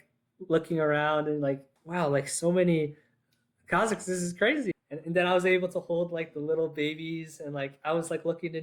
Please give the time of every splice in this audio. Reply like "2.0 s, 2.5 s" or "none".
1.8 s, 4.7 s